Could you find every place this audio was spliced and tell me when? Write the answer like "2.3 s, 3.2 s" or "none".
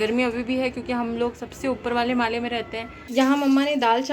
3.0 s